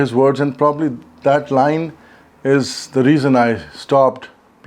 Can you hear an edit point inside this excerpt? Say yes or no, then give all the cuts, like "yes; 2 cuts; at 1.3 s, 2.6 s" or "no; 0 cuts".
no; 0 cuts